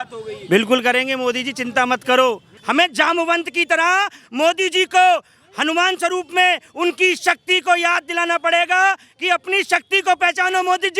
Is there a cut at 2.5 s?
yes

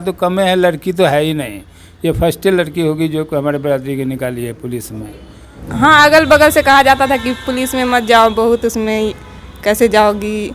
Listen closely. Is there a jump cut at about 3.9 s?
no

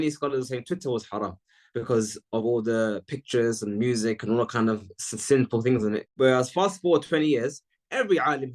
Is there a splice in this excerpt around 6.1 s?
no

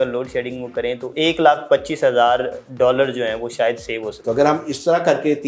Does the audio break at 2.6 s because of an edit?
no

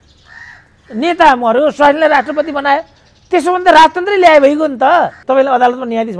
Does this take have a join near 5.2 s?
yes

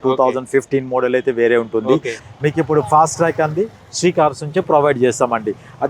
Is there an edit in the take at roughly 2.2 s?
yes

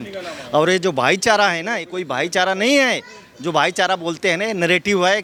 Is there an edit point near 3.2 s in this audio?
no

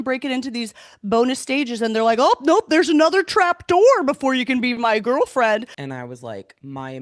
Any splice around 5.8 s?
yes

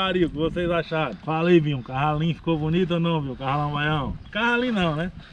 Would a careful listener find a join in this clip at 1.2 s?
yes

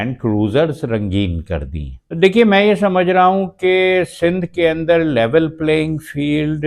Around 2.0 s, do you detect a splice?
yes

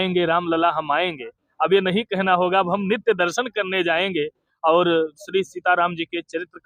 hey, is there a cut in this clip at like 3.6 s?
no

